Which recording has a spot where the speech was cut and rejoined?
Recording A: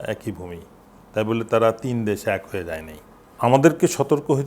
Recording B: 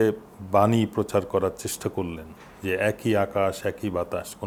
A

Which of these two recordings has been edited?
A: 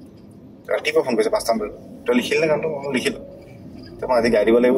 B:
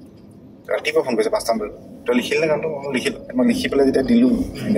B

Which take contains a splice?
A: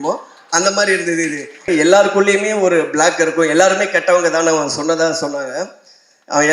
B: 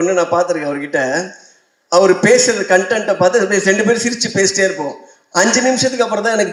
A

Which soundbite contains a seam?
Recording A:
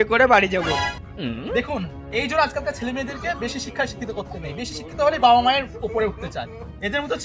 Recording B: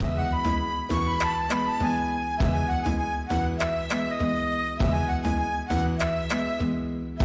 A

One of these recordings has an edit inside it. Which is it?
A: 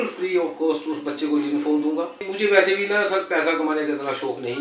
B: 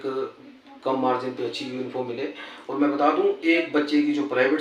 A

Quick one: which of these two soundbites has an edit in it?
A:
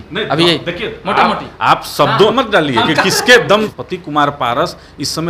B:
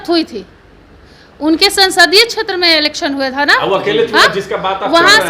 A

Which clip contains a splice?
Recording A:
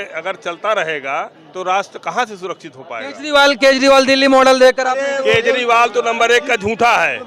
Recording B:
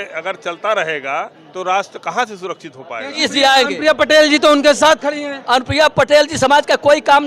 B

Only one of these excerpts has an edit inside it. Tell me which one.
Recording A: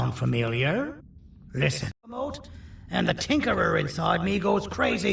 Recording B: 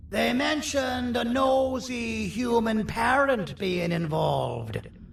A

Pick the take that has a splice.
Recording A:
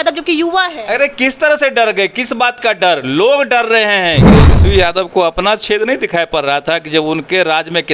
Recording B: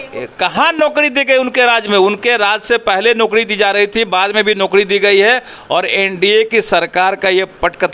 A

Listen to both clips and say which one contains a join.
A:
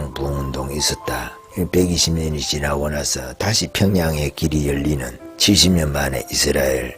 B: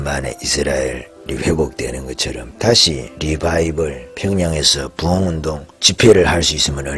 B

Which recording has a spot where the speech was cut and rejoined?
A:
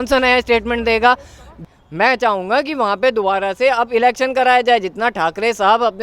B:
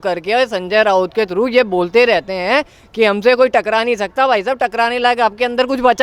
A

